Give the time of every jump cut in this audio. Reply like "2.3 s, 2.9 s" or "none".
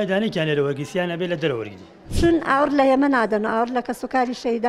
2.0 s